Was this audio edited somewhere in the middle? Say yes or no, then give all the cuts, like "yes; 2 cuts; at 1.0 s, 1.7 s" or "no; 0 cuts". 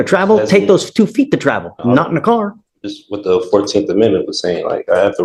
no; 0 cuts